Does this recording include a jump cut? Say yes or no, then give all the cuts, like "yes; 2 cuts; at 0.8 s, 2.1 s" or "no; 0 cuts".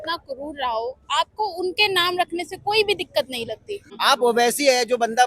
yes; 1 cut; at 3.8 s